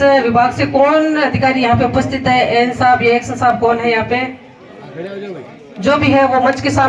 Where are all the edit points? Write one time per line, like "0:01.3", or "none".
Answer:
none